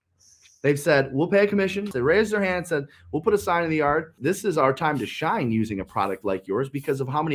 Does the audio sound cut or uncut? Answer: cut